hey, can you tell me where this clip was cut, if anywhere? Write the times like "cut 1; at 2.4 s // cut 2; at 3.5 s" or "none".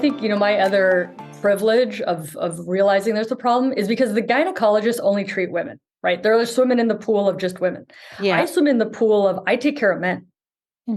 none